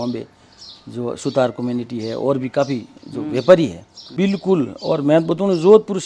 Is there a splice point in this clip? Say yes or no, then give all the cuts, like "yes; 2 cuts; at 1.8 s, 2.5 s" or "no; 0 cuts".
yes; 1 cut; at 4.0 s